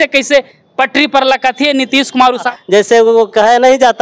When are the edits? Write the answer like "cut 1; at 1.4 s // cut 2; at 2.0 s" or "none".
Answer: cut 1; at 2.5 s